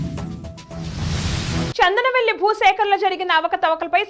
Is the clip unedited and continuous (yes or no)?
no